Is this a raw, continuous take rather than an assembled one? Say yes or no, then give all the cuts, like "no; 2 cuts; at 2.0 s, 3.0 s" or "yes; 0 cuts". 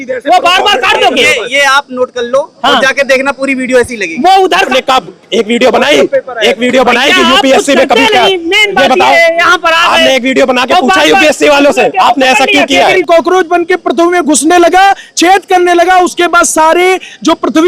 no; 2 cuts; at 4.7 s, 13.0 s